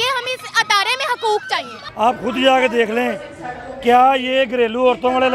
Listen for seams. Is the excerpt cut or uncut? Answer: cut